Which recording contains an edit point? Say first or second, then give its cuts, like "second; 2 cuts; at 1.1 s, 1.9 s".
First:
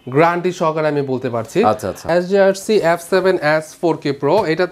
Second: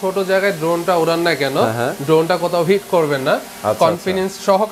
first; 1 cut; at 2.0 s